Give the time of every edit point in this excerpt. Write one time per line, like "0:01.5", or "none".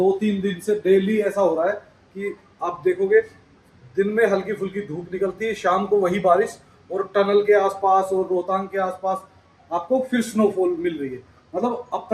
none